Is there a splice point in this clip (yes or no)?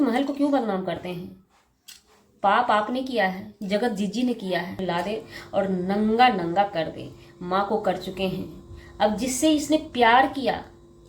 yes